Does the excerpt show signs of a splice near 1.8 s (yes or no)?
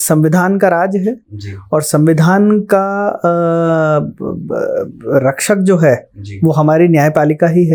no